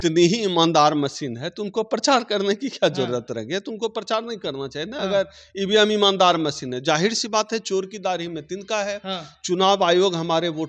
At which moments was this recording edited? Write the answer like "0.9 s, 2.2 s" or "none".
none